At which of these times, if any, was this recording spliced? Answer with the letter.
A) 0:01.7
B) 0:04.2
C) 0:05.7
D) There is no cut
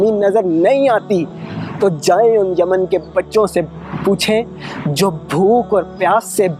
D